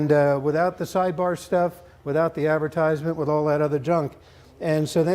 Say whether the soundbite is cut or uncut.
cut